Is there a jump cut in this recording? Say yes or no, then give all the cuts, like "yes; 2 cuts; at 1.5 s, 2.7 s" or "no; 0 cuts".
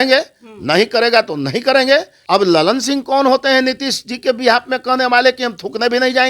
yes; 1 cut; at 2.2 s